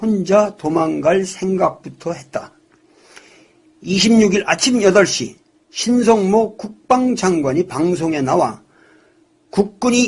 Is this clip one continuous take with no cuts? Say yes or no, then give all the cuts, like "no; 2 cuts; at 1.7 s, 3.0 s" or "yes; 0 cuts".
no; 1 cut; at 8.8 s